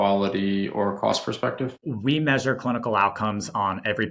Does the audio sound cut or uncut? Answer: cut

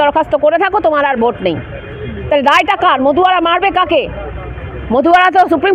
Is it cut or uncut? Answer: uncut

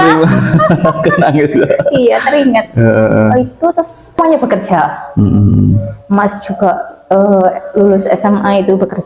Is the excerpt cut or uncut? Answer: cut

